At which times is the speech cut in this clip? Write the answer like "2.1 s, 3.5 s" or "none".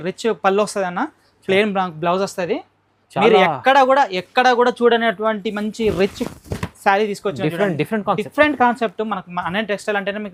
none